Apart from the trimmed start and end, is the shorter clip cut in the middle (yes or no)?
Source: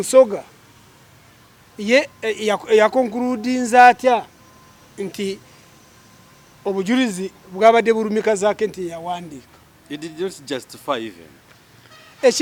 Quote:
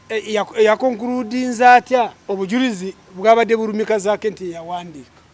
yes